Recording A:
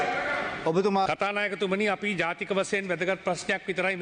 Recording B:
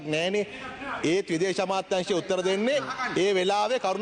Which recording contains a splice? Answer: A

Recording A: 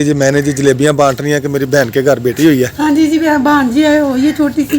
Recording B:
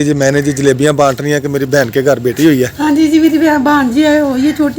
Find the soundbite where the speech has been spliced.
A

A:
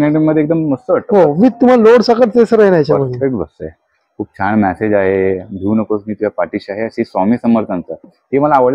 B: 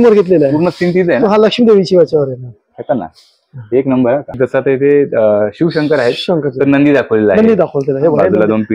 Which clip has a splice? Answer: B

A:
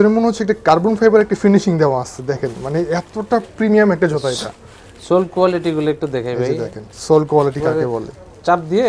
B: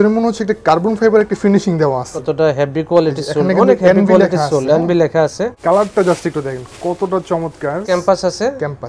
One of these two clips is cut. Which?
B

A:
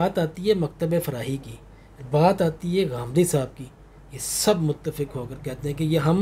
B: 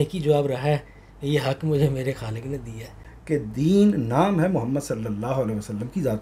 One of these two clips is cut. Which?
B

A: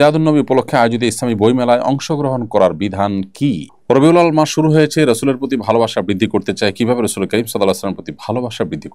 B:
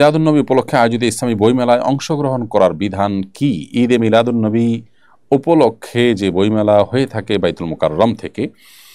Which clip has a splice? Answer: A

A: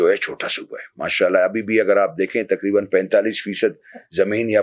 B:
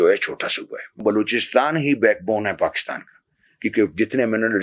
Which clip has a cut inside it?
B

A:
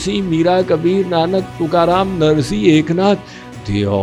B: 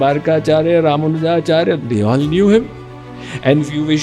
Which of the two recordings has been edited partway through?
B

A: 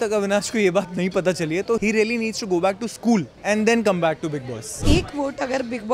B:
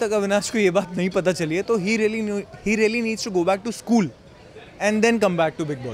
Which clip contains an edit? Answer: A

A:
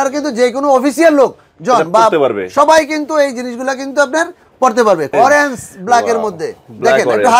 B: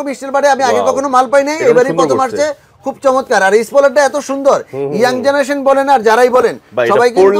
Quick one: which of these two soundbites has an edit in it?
A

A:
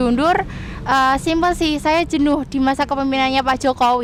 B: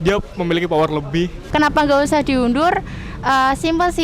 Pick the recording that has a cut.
B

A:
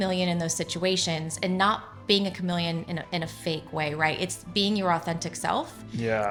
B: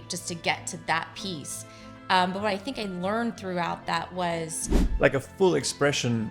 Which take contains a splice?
B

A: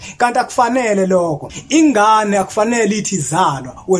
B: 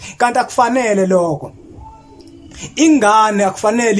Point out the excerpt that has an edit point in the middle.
A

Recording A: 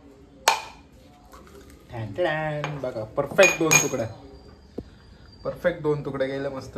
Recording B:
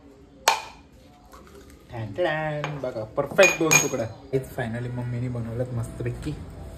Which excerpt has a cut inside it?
B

